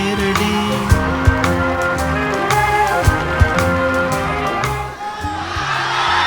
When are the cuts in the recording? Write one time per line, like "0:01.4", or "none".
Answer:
0:04.7

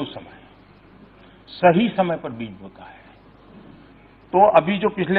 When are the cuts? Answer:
none

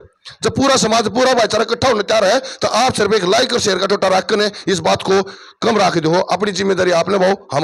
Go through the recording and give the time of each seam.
none

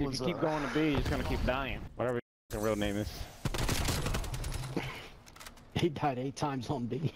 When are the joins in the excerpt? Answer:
0:01.8

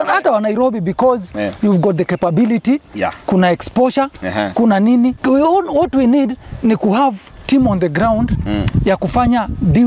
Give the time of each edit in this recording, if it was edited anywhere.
none

